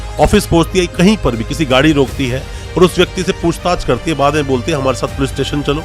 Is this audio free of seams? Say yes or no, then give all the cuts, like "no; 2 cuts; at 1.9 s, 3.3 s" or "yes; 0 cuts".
yes; 0 cuts